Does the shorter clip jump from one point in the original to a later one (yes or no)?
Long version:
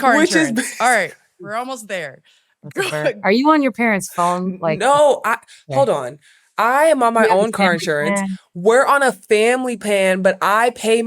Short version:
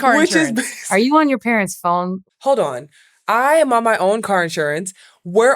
yes